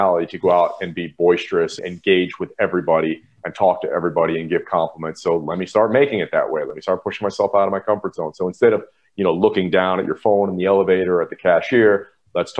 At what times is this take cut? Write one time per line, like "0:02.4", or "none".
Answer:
none